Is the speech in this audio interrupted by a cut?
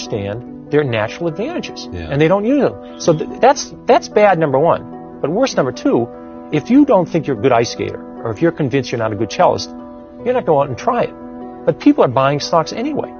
no; 0 cuts

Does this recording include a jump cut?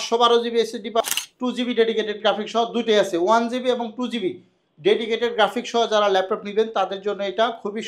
yes; 1 cut; at 1.0 s

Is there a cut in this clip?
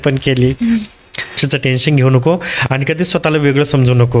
yes; 1 cut; at 1.4 s

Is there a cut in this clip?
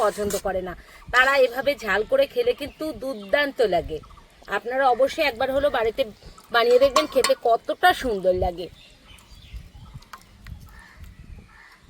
yes; 1 cut; at 8.7 s

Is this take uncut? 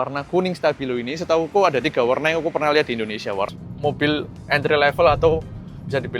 no; 1 cut; at 3.5 s

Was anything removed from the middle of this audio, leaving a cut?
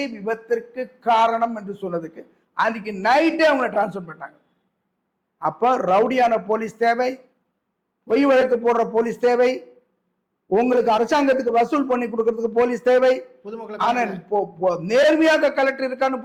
no; 0 cuts

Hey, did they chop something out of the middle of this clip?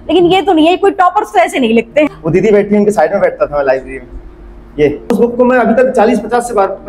yes; 2 cuts; at 2.1 s, 5.1 s

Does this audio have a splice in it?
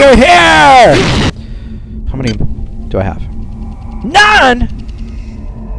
yes; 1 cut; at 1.3 s

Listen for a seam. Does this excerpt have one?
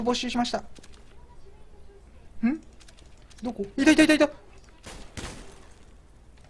yes; 1 cut; at 4.4 s

